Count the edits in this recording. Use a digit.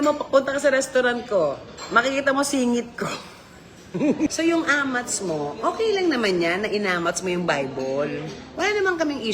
1